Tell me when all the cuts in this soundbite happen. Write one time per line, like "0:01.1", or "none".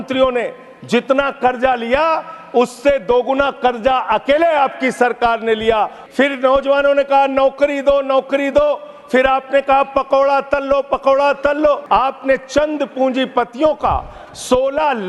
0:06.0
0:11.8